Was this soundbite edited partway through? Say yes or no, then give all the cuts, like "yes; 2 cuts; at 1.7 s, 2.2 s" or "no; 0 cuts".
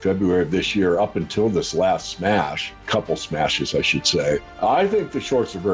yes; 2 cuts; at 2.8 s, 4.5 s